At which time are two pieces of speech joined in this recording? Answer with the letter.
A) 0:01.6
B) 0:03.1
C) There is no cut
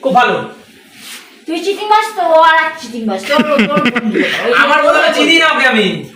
C